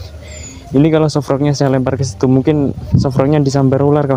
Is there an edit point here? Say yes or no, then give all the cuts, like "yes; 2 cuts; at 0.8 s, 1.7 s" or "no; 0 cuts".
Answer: no; 0 cuts